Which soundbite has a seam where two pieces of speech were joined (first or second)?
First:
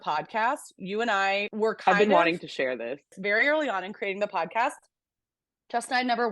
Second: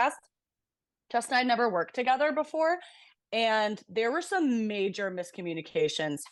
first